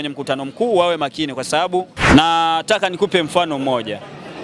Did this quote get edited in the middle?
yes; 1 cut; at 2.0 s

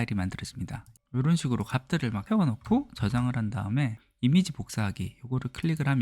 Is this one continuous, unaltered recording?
no; 3 cuts; at 0.9 s, 2.2 s, 4.0 s

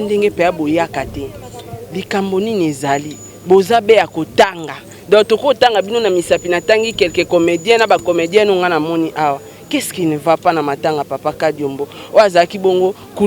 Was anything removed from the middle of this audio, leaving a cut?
no; 0 cuts

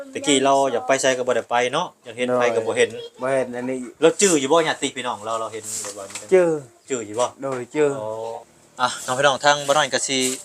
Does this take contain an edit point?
yes; 1 cut; at 8.4 s

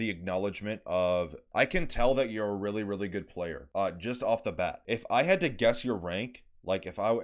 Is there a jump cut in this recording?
yes; 2 cuts; at 3.6 s, 4.8 s

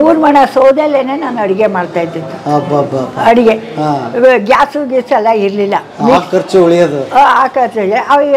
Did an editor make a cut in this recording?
no; 0 cuts

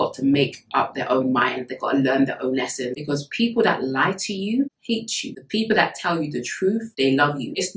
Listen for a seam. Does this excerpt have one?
yes; 1 cut; at 2.9 s

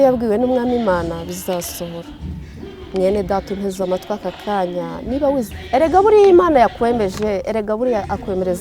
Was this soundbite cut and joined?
yes; 1 cut; at 5.5 s

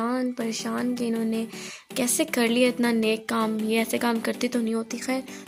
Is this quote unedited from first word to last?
yes; 0 cuts

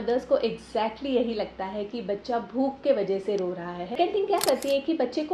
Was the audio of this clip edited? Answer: yes; 1 cut; at 4.0 s

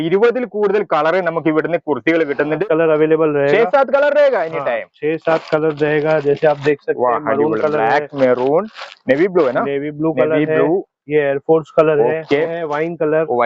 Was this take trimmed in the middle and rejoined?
yes; 2 cuts; at 2.6 s, 12.5 s

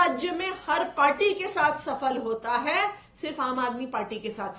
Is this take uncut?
yes; 0 cuts

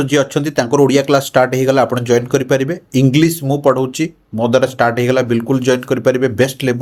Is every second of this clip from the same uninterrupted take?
yes; 0 cuts

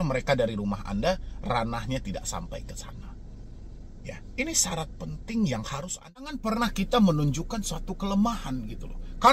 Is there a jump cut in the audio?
yes; 1 cut; at 6.3 s

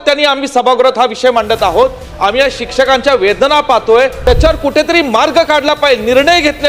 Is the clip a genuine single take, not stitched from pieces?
no; 1 cut; at 4.2 s

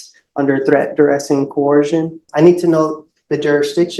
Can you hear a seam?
yes; 1 cut; at 2.2 s

